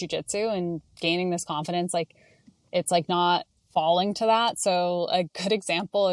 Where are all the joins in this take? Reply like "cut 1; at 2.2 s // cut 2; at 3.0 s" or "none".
cut 1; at 3.6 s